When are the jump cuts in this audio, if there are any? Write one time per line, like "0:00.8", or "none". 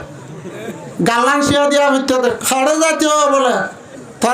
0:02.4